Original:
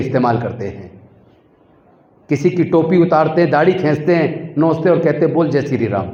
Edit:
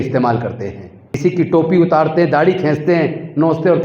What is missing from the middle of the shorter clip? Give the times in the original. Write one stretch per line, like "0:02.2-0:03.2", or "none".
0:01.2-0:02.4